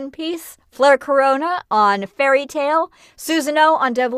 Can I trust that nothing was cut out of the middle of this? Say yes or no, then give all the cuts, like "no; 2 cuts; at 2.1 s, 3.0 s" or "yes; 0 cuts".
yes; 0 cuts